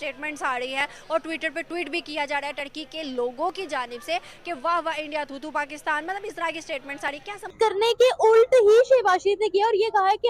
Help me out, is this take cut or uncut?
cut